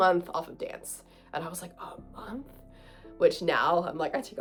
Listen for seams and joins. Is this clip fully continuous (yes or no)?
yes